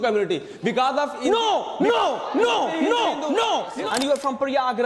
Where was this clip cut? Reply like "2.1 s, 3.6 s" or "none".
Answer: 3.8 s